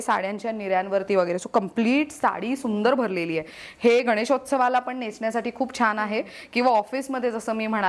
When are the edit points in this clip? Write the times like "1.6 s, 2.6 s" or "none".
none

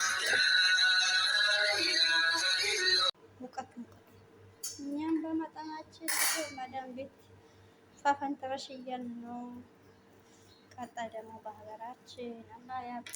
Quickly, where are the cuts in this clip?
3.3 s

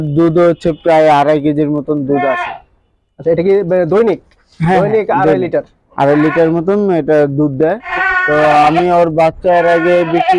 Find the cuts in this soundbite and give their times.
7.9 s

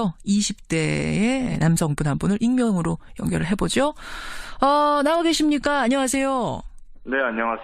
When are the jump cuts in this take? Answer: 5.2 s

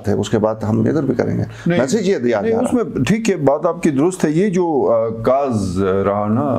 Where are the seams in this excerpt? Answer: none

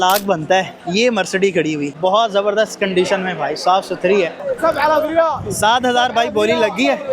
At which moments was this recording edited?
4.5 s

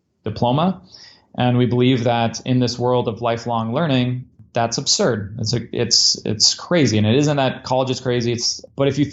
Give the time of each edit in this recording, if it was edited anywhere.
4.4 s

